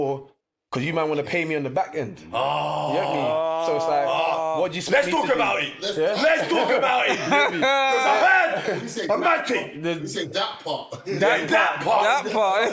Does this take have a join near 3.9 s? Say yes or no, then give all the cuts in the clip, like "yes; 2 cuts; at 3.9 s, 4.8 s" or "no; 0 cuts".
no; 0 cuts